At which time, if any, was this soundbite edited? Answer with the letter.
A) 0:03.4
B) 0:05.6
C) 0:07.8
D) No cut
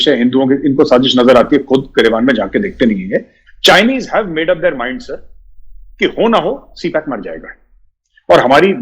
A